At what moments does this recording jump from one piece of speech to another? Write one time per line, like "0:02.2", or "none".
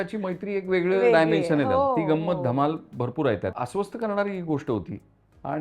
0:03.5